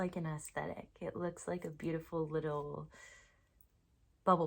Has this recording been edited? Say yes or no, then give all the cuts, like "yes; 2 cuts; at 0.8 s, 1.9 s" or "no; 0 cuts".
no; 0 cuts